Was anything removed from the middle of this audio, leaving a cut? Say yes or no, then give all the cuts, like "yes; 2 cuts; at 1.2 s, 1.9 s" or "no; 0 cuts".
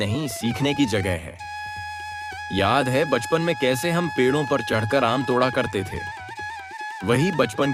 no; 0 cuts